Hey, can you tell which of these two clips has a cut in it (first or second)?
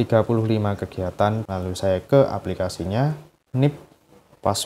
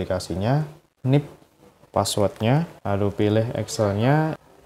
first